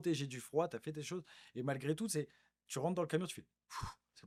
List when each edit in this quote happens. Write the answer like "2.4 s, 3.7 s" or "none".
none